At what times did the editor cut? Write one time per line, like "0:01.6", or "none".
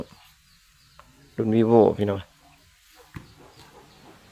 none

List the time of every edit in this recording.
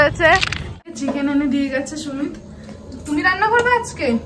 0:00.9

